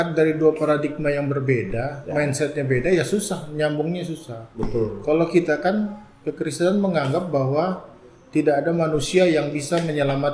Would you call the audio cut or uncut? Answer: uncut